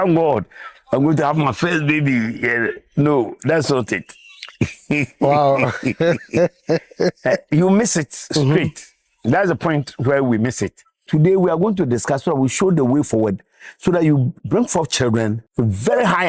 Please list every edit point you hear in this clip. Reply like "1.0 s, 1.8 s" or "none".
11.0 s, 14.4 s, 15.4 s